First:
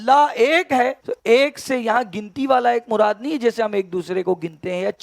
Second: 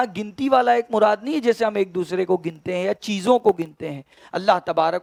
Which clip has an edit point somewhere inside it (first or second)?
first